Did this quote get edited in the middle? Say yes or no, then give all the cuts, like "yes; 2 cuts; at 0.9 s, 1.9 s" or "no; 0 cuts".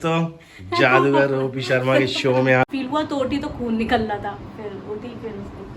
yes; 1 cut; at 2.7 s